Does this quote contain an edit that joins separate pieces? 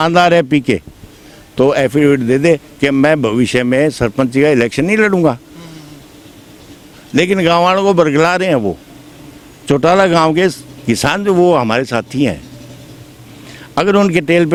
no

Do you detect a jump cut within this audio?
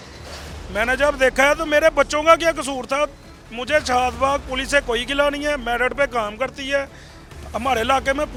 no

